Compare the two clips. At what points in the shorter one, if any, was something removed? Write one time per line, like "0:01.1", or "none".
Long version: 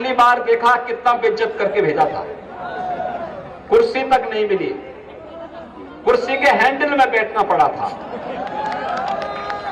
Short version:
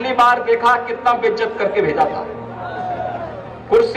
none